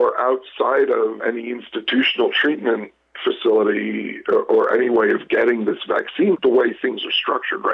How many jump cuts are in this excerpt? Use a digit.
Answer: 2